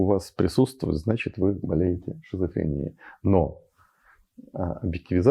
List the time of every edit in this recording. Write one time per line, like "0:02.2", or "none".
none

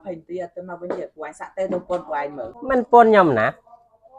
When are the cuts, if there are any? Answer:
0:02.6

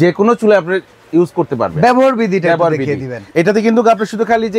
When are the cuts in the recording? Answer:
none

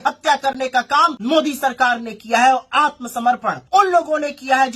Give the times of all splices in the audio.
0:01.2
0:03.5

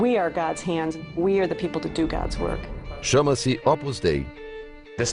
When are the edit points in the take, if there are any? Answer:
none

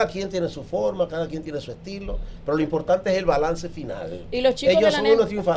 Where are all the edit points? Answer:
none

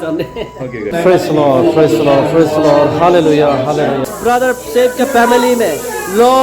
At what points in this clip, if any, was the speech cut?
0:00.9
0:04.1

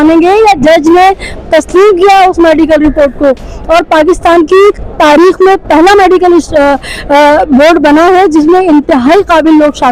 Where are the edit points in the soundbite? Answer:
none

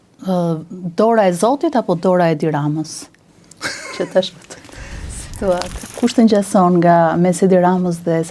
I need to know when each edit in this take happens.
0:05.8

